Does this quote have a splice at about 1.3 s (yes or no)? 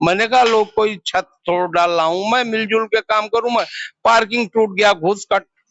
no